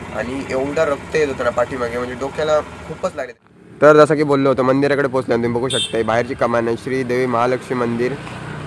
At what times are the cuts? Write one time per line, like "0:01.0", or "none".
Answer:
0:03.2